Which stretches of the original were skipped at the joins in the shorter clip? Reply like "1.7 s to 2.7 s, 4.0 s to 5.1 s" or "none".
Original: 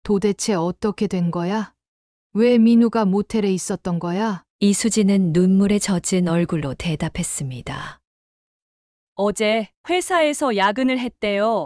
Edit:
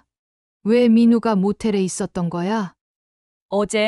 4.5 s to 8.4 s